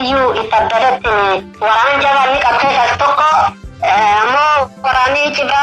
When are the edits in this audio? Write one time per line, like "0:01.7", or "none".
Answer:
0:01.5